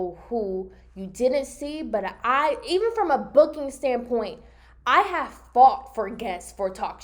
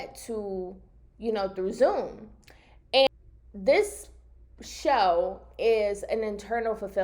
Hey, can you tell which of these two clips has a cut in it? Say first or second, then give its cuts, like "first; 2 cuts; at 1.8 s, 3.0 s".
second; 1 cut; at 3.1 s